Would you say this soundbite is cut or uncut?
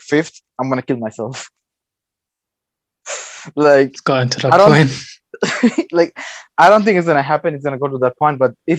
uncut